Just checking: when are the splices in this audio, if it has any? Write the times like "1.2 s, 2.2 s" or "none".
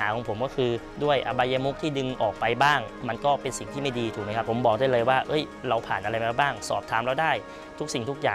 0.9 s, 4.5 s